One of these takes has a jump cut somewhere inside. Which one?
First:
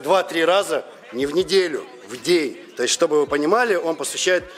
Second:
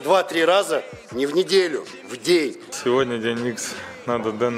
second; 1 cut; at 2.7 s

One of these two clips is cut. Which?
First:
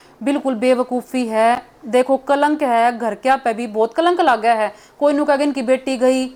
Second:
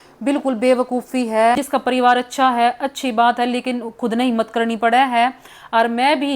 second; 1 cut; at 1.6 s

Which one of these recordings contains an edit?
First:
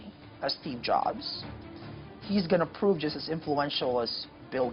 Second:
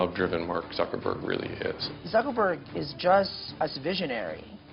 second; 2 cuts; at 1.9 s, 3.4 s

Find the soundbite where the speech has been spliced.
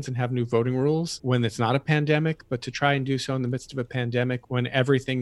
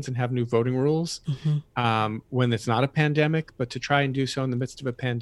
first; 2 cuts; at 1.2 s, 4.4 s

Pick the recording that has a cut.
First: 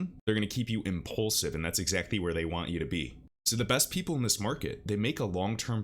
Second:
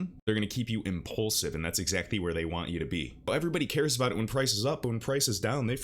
second; 1 cut; at 3.3 s

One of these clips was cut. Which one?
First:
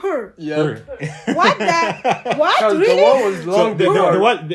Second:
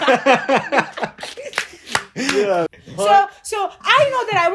second; 1 cut; at 2.7 s

